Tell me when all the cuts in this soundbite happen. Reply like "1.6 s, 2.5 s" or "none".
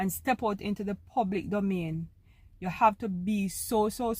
none